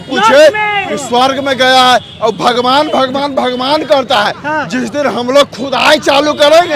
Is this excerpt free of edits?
yes; 0 cuts

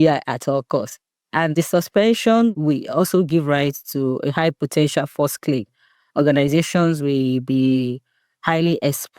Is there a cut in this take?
yes; 2 cuts; at 1.5 s, 2.5 s

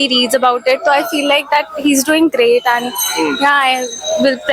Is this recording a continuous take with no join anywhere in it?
yes; 0 cuts

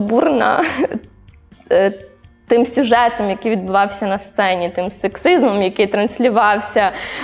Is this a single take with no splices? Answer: yes; 0 cuts

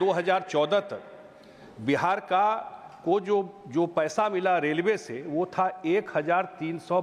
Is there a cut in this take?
no; 0 cuts

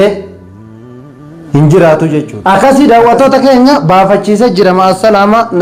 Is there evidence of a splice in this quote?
yes; 1 cut; at 2.3 s

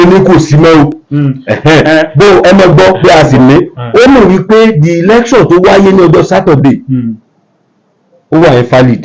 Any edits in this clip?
no; 0 cuts

